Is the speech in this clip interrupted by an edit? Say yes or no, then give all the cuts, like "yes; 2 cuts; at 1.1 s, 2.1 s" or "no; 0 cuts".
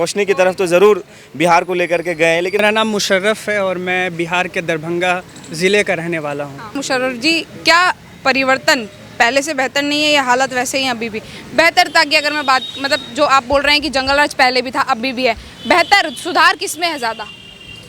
yes; 2 cuts; at 2.6 s, 6.8 s